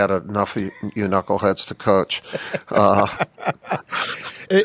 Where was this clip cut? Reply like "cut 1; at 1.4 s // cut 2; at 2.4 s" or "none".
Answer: cut 1; at 3.1 s